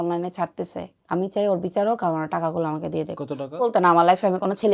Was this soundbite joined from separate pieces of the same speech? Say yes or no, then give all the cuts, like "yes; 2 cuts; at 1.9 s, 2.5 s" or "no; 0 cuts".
yes; 2 cuts; at 1.0 s, 3.7 s